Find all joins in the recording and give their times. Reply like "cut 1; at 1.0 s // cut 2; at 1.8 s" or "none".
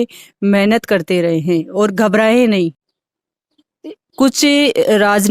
cut 1; at 2.8 s